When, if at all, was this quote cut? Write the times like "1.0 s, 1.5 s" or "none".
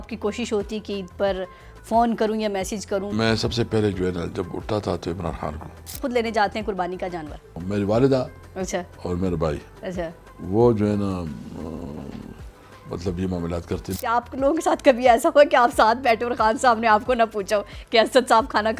3.1 s, 6.0 s, 7.5 s, 13.9 s

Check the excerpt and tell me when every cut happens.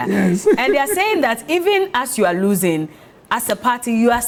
none

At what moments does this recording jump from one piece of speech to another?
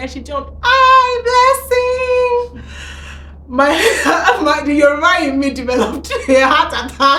none

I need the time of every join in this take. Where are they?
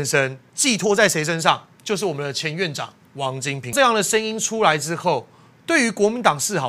3.7 s

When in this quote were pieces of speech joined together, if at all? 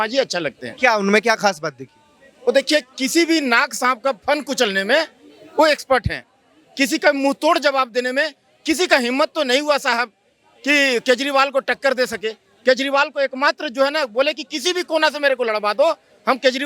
none

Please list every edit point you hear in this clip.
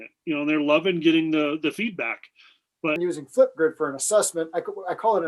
3.0 s

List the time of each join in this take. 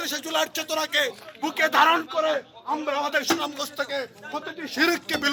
none

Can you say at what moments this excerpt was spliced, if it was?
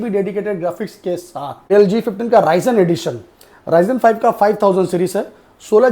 1.7 s

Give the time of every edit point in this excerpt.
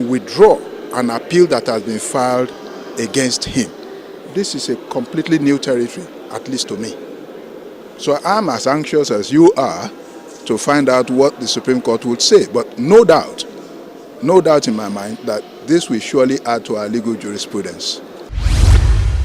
18.3 s

